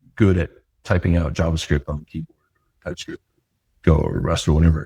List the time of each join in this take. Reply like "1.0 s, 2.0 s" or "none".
none